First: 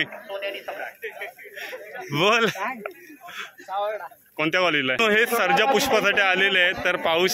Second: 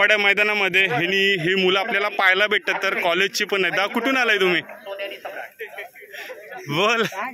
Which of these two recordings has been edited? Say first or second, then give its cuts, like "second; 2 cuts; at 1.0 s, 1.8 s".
first; 1 cut; at 5.0 s